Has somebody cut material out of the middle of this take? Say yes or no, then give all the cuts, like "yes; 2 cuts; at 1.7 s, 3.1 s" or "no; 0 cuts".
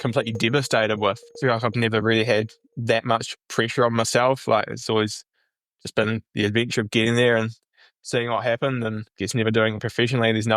yes; 2 cuts; at 1.3 s, 9.1 s